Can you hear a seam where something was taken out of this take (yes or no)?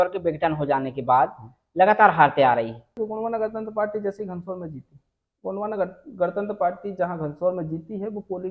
yes